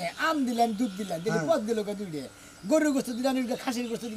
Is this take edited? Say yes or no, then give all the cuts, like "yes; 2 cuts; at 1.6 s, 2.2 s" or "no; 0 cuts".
no; 0 cuts